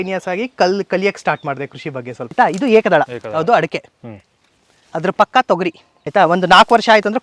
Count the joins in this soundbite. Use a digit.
3